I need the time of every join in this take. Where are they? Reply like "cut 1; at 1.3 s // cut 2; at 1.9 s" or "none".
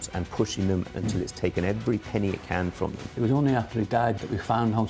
cut 1; at 0.9 s // cut 2; at 3.0 s // cut 3; at 4.2 s